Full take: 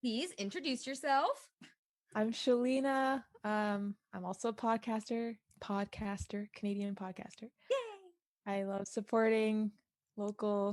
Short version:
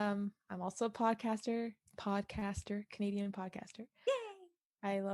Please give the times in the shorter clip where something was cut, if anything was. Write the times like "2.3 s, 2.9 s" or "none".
none